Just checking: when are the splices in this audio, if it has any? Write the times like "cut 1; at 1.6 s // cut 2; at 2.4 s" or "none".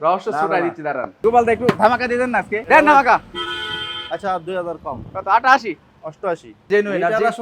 cut 1; at 1.2 s // cut 2; at 2.6 s // cut 3; at 6.7 s